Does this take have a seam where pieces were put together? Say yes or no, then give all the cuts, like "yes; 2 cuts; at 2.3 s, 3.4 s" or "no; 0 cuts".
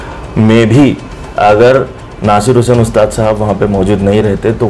no; 0 cuts